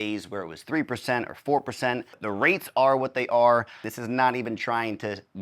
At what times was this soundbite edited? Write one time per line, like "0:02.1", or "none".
0:02.1
0:03.9